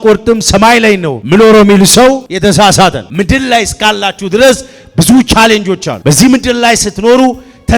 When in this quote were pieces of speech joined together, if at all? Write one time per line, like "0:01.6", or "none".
0:01.1
0:02.3
0:03.0
0:05.9